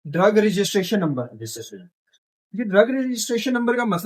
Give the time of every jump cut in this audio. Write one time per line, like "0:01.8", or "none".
none